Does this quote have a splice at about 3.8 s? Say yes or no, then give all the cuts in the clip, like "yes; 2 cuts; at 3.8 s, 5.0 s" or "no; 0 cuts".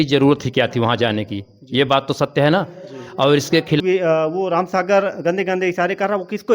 yes; 1 cut; at 3.8 s